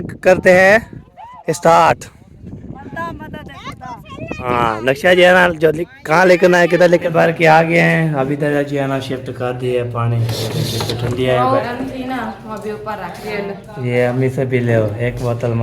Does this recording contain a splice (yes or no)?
yes